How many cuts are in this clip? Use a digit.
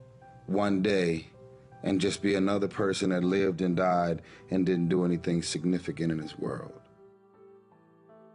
1